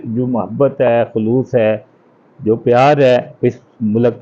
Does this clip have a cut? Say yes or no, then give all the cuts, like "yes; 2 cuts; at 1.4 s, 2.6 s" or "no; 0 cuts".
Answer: no; 0 cuts